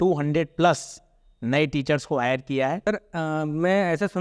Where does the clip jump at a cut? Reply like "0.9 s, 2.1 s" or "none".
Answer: 2.9 s